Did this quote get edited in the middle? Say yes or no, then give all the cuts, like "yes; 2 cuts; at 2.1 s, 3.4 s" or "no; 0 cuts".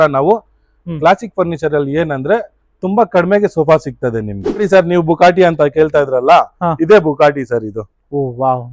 yes; 1 cut; at 4.6 s